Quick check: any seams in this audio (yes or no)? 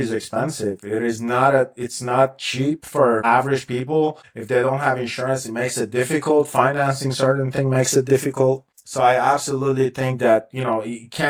no